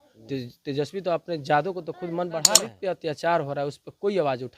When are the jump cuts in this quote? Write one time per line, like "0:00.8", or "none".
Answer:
0:02.6